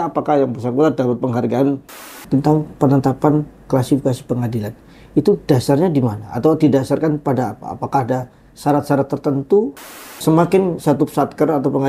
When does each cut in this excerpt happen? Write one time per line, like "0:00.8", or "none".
0:02.1
0:09.8